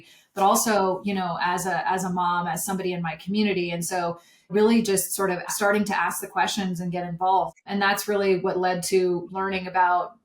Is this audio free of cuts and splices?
no; 4 cuts; at 4.5 s, 5.5 s, 7.5 s, 9.3 s

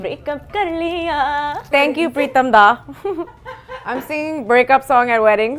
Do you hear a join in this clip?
yes; 1 cut; at 1.7 s

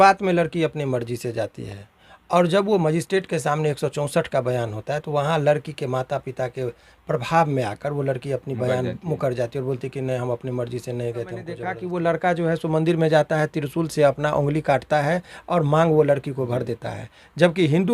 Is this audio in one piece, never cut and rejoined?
no; 1 cut; at 11.7 s

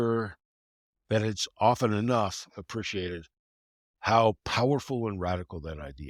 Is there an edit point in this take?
no; 0 cuts

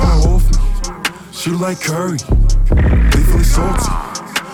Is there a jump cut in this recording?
no; 0 cuts

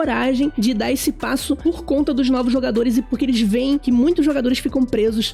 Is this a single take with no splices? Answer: yes; 0 cuts

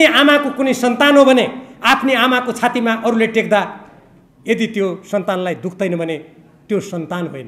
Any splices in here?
no; 0 cuts

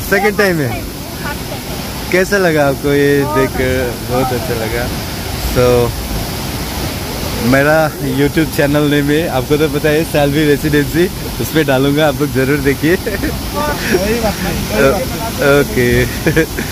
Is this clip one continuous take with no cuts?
yes; 0 cuts

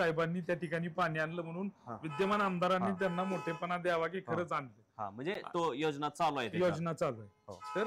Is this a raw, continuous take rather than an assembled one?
yes; 0 cuts

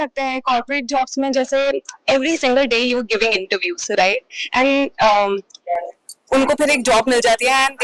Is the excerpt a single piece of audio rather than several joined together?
yes; 0 cuts

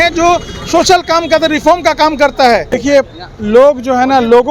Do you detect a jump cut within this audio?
yes; 1 cut; at 2.8 s

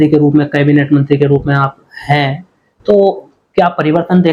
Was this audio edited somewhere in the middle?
no; 0 cuts

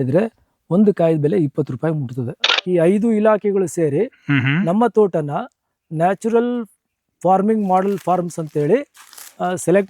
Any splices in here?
yes; 1 cut; at 2.5 s

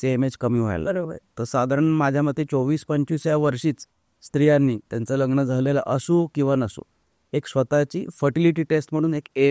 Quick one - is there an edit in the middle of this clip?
no; 0 cuts

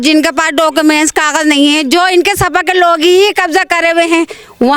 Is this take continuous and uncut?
yes; 0 cuts

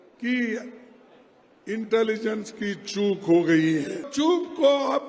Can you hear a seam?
yes; 1 cut; at 4.1 s

